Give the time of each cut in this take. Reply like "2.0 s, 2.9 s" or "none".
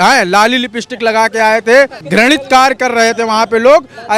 2.0 s